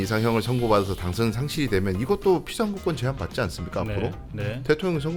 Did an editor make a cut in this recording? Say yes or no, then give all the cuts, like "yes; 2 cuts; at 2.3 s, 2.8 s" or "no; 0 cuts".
no; 0 cuts